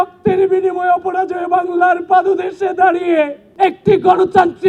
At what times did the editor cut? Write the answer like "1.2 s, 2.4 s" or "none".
3.4 s